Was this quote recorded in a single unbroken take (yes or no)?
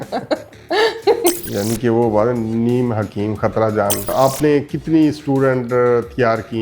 no